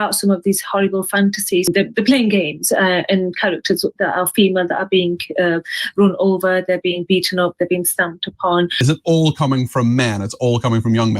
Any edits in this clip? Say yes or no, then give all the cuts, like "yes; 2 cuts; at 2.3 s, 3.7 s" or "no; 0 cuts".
yes; 2 cuts; at 1.7 s, 8.8 s